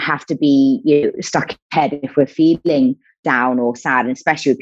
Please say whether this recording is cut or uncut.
uncut